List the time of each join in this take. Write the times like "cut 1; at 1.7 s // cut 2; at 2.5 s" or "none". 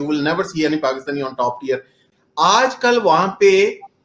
cut 1; at 2.0 s